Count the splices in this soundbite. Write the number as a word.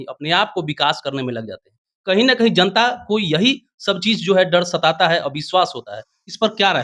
zero